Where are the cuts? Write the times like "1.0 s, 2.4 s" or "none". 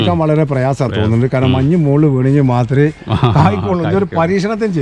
none